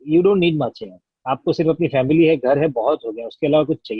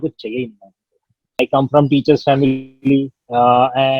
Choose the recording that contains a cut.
second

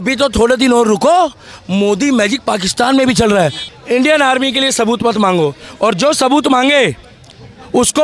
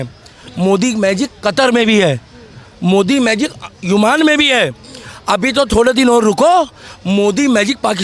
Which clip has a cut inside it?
first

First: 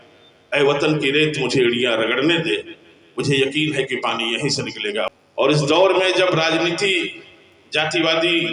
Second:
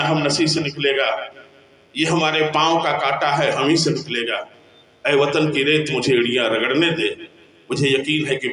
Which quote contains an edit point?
first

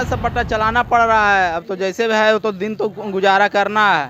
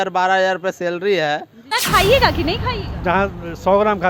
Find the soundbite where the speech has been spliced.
second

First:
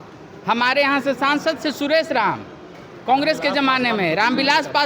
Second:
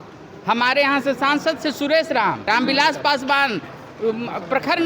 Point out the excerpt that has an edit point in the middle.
second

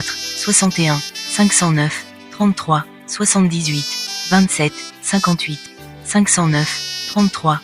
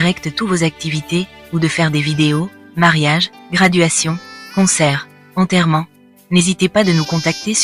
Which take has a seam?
first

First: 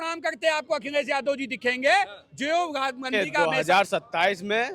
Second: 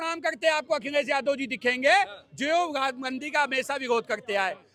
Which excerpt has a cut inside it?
first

